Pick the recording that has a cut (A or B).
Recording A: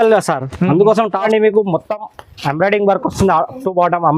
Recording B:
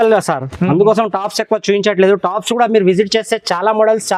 A